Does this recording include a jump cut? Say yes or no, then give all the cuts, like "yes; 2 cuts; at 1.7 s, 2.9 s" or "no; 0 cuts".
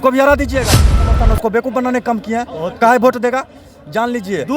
yes; 1 cut; at 1.1 s